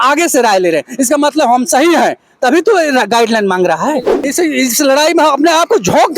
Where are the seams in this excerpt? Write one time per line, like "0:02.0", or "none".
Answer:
0:04.3